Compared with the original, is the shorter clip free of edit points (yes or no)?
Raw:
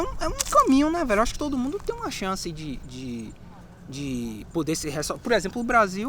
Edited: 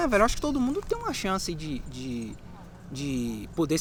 yes